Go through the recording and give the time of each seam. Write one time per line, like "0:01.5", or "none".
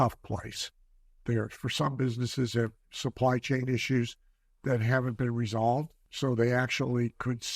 0:01.2
0:06.0